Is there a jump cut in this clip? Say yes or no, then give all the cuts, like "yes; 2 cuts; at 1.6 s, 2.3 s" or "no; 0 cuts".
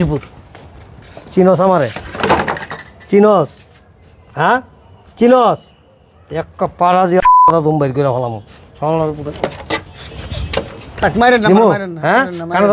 no; 0 cuts